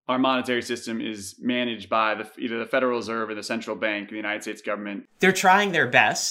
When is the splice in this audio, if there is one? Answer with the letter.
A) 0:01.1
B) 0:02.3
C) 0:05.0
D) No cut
C